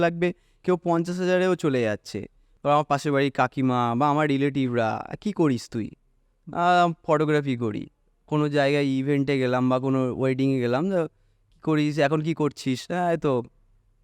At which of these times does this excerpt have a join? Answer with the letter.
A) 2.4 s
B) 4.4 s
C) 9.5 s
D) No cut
A